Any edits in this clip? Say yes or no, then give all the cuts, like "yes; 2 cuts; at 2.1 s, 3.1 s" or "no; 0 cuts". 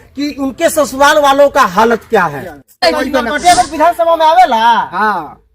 yes; 1 cut; at 2.8 s